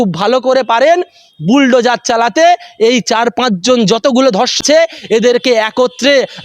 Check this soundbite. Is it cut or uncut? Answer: cut